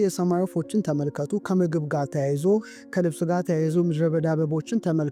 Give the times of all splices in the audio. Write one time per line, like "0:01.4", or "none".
none

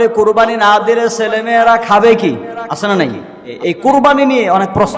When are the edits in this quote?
0:03.5

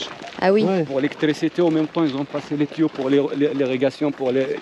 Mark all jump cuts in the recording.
none

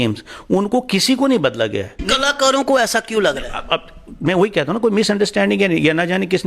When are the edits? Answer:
0:02.0

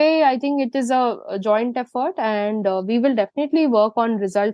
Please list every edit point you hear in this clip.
none

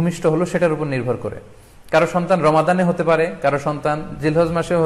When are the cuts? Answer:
none

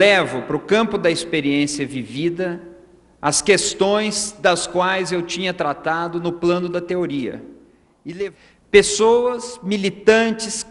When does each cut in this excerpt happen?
0:08.3

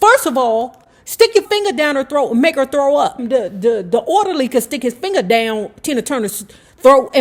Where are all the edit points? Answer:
0:01.5
0:03.2

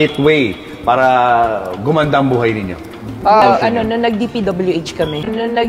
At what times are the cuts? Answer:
0:03.4

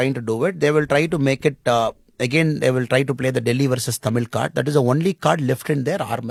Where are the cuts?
none

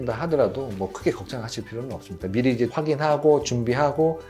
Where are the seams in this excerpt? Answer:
0:02.7

